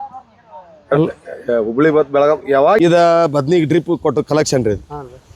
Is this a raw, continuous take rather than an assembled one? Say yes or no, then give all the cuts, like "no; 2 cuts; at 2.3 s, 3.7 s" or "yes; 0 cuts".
no; 1 cut; at 2.8 s